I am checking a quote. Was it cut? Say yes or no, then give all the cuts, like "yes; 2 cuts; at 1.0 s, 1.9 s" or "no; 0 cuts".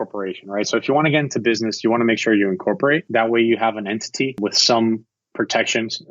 yes; 2 cuts; at 3.1 s, 4.4 s